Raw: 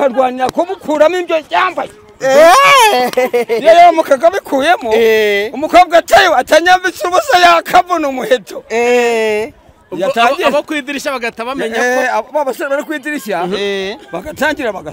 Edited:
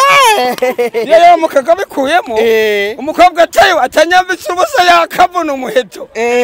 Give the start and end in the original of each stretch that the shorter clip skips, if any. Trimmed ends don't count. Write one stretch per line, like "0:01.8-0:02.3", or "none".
none